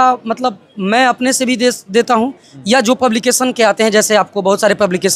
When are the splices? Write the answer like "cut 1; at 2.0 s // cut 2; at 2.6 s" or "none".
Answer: none